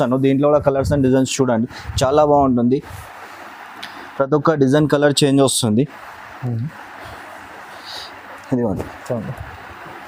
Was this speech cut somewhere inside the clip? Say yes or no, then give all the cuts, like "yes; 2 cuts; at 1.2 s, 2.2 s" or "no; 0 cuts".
no; 0 cuts